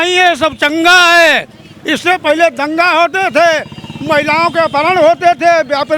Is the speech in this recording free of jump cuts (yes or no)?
yes